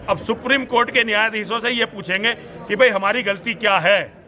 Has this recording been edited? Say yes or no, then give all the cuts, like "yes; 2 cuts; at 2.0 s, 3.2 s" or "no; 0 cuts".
no; 0 cuts